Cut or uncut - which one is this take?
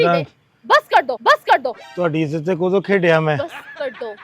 uncut